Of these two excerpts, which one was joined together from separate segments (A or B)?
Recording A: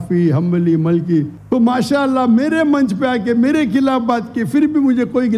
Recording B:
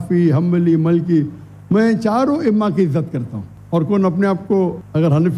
A